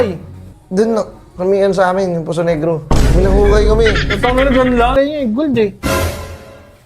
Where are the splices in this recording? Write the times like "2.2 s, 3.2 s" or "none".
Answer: 4.9 s